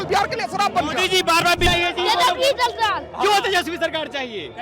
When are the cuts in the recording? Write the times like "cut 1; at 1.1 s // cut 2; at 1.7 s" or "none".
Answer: cut 1; at 1.7 s